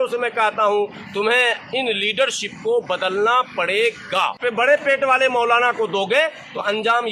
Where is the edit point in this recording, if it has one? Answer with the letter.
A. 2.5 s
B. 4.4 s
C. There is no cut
B